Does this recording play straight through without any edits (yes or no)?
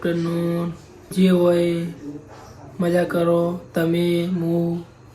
no